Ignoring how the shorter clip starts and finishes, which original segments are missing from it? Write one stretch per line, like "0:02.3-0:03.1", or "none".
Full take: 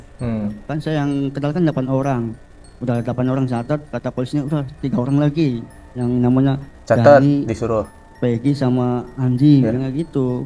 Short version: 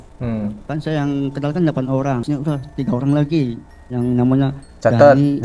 0:02.2-0:04.3